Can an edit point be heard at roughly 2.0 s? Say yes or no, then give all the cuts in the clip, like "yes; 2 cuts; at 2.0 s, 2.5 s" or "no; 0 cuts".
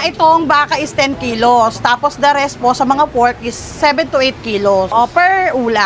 no; 1 cut; at 4.9 s